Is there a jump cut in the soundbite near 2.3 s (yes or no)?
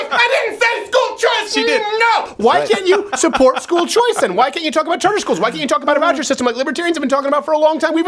yes